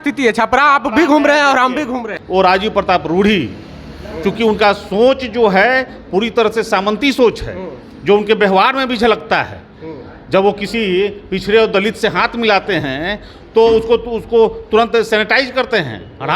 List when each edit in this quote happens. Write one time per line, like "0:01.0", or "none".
0:02.1